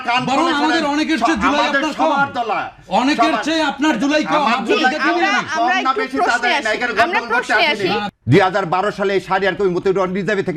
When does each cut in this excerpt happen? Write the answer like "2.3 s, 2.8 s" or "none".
8.1 s